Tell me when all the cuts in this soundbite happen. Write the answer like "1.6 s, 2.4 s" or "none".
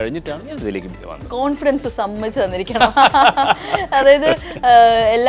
1.2 s